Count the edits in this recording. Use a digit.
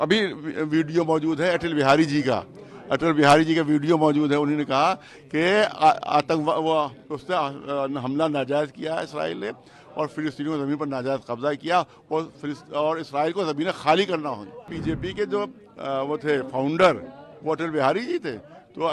1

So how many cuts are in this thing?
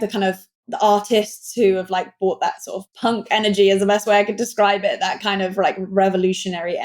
1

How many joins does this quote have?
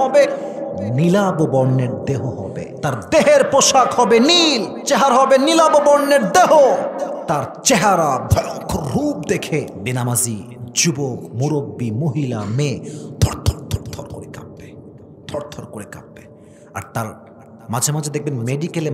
4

